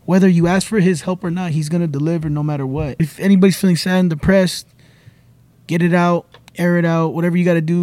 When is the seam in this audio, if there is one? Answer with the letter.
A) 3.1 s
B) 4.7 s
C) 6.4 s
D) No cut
A